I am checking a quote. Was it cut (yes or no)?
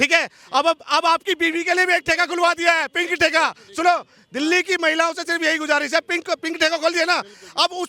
no